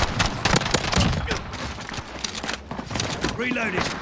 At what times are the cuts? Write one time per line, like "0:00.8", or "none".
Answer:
none